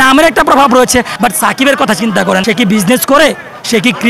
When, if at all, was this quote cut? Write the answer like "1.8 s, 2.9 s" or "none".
1.1 s, 2.4 s